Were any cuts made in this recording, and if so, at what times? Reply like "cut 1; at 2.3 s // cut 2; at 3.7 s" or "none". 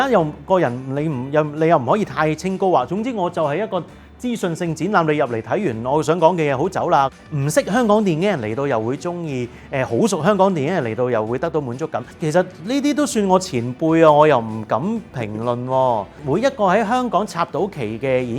cut 1; at 7.2 s // cut 2; at 12.0 s // cut 3; at 16.2 s

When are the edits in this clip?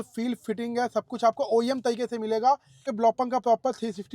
cut 1; at 2.9 s

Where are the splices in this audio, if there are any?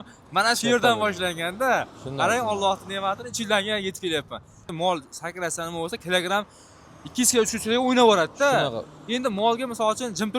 cut 1; at 4.7 s

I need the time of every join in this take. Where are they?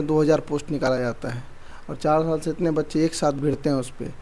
none

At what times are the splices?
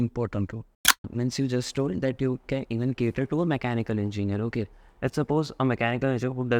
cut 1; at 1.1 s

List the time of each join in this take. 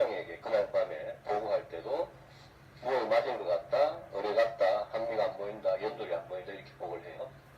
none

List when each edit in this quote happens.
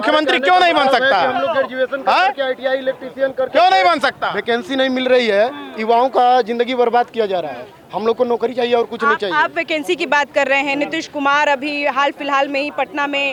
none

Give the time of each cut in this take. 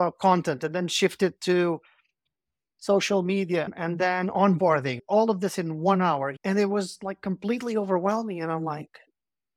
cut 1; at 5.0 s // cut 2; at 6.3 s

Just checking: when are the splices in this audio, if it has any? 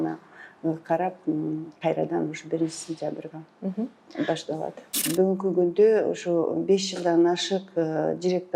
cut 1; at 5.0 s

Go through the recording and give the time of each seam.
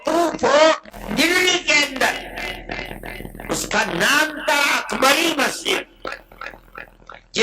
cut 1; at 0.9 s

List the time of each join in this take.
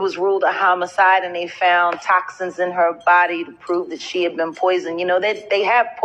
none

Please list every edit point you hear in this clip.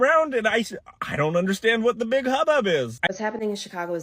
cut 1; at 3.0 s

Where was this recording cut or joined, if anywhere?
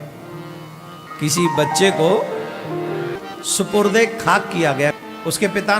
cut 1; at 1.0 s // cut 2; at 3.1 s // cut 3; at 5.0 s

